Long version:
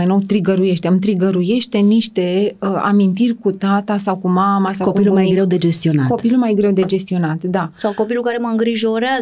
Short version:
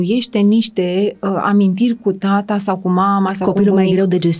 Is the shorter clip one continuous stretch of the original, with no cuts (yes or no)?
yes